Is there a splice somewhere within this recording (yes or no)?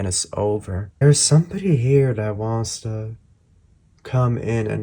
yes